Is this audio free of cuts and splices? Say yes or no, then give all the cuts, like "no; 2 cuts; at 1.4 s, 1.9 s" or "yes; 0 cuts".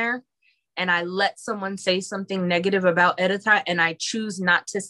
yes; 0 cuts